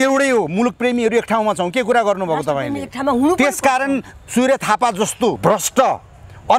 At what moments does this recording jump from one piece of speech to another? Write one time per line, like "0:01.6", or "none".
0:05.4